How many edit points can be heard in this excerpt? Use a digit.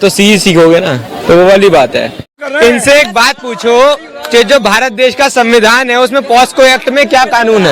1